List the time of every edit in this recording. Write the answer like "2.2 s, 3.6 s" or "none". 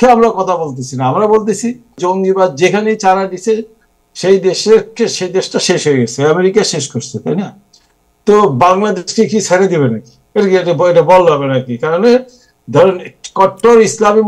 2.0 s